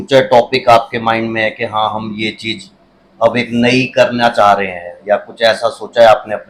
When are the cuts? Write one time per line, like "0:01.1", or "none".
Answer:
none